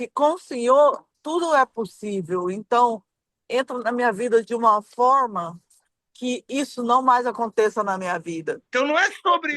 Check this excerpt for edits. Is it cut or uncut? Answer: cut